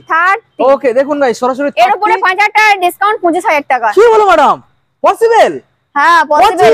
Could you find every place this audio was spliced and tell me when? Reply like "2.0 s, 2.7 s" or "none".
none